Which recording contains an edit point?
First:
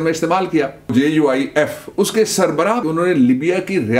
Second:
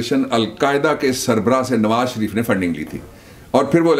first; 2 cuts; at 0.9 s, 2.8 s

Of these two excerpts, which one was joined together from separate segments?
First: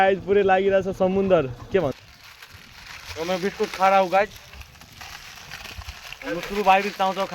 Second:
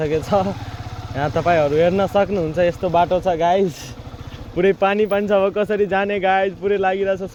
first; 1 cut; at 1.9 s

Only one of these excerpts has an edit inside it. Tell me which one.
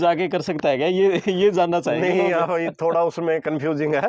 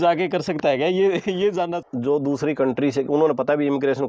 second; 1 cut; at 1.8 s

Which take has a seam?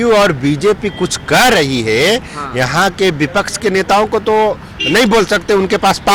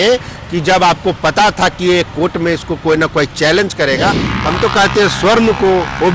second; 1 cut; at 4.3 s

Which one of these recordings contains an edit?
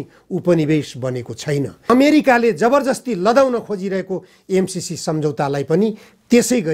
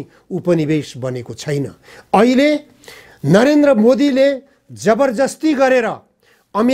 first; 1 cut; at 1.9 s

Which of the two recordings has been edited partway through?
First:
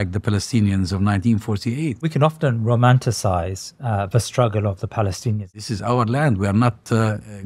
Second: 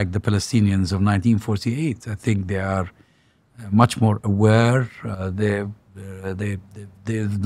first; 2 cuts; at 2.0 s, 5.6 s

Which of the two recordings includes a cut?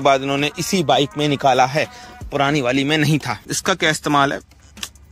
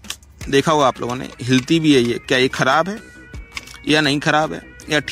first; 1 cut; at 3.5 s

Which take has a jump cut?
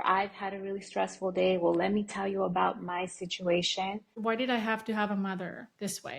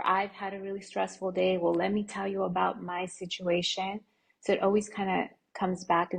first; 1 cut; at 4.1 s

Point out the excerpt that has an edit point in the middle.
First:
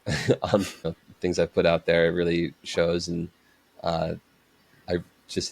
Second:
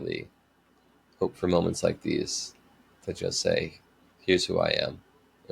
first; 1 cut; at 1.0 s

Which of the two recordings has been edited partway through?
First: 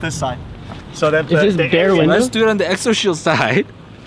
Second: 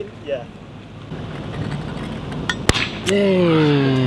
second; 1 cut; at 3.0 s

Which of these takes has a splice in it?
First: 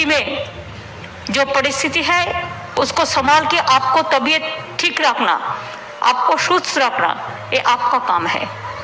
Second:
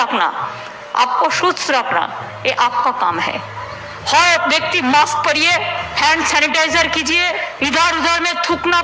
second; 2 cuts; at 5.9 s, 7.5 s

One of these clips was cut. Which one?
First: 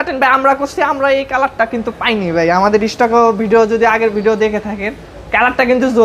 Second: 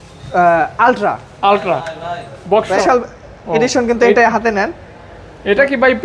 second; 1 cut; at 2.8 s

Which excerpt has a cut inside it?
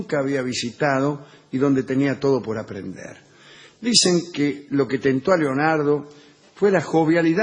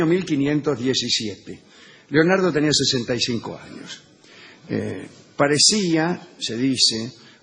second; 1 cut; at 4.9 s

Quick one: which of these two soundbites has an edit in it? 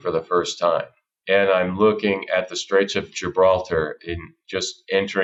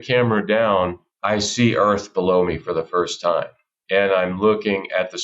second; 1 cut; at 1.1 s

